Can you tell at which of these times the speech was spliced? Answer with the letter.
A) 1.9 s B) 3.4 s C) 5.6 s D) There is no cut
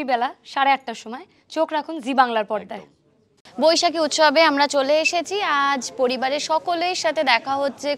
D